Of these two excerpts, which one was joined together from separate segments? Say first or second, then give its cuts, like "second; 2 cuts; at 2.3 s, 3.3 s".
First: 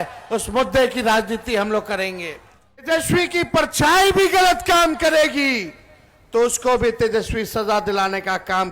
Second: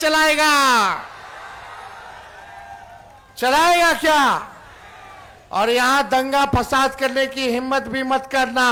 first; 1 cut; at 2.8 s